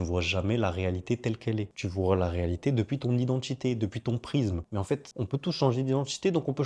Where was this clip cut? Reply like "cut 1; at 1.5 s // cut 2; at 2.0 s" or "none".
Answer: none

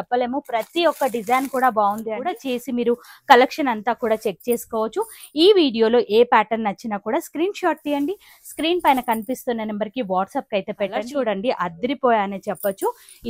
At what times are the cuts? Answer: cut 1; at 2.4 s // cut 2; at 11.1 s

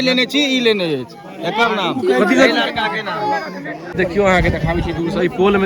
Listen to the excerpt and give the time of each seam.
cut 1; at 3.9 s

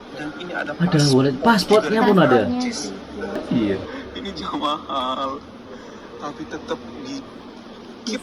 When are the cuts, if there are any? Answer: cut 1; at 3.4 s

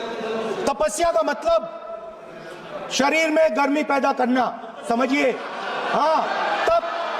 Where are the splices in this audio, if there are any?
none

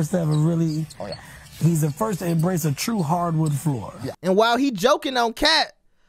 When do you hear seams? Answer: cut 1; at 4.1 s

